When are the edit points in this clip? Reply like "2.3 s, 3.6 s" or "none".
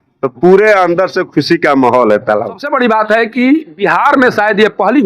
2.6 s